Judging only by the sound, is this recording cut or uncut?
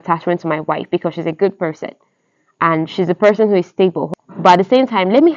cut